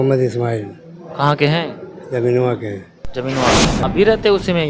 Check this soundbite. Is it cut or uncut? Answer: cut